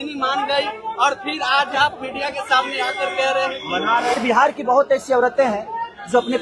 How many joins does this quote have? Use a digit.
1